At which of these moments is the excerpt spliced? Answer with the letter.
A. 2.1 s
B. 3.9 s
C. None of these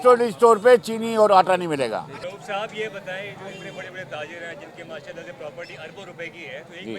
A